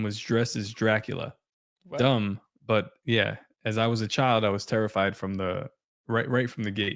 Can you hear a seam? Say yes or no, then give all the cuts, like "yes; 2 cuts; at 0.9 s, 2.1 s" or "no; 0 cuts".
no; 0 cuts